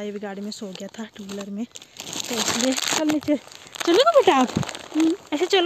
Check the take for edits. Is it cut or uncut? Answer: uncut